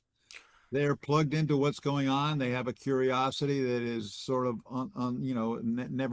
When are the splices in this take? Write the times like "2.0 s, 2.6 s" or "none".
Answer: none